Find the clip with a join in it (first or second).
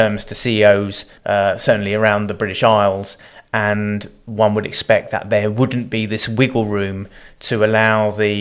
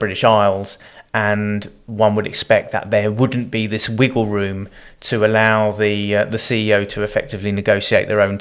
first